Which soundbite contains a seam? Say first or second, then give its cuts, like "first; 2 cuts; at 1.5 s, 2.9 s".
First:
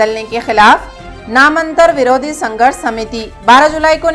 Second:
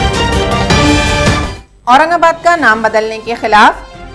second; 1 cut; at 1.5 s